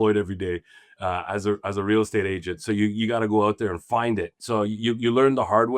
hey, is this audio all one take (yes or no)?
no